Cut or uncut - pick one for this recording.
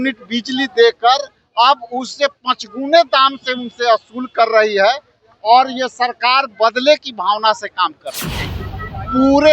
cut